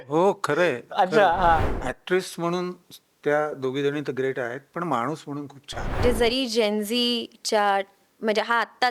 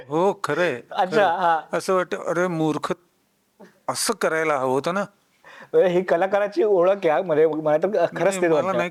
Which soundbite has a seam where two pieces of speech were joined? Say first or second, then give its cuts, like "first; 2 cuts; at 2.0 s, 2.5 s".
first; 2 cuts; at 1.6 s, 6.0 s